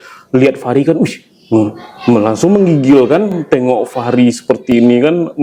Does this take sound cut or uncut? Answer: uncut